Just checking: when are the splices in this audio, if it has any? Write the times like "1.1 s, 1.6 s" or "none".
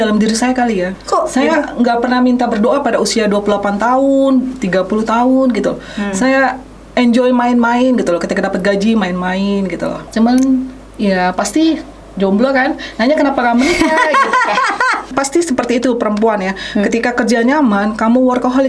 1.0 s, 10.0 s, 15.1 s